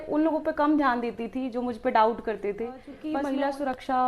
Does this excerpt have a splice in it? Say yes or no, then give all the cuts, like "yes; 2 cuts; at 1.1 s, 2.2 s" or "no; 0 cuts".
yes; 1 cut; at 3.0 s